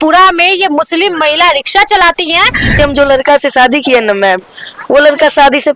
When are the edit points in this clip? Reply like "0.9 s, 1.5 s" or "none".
2.7 s